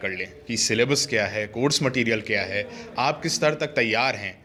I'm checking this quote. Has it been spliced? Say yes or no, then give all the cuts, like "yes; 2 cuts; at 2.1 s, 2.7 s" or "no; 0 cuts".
no; 0 cuts